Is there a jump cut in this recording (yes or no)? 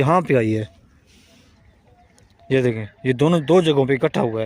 yes